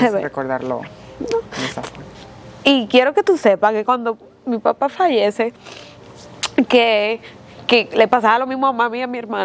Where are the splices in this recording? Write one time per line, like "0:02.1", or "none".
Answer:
none